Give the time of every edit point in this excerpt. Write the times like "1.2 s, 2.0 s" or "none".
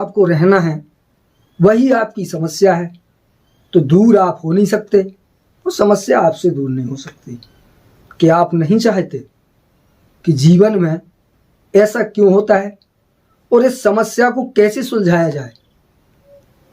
none